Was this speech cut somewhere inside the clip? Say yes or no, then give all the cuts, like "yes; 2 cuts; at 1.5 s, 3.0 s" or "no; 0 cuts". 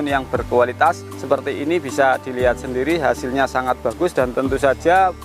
yes; 1 cut; at 1.1 s